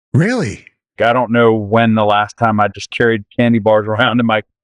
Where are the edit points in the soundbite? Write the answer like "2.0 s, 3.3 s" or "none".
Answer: 1.0 s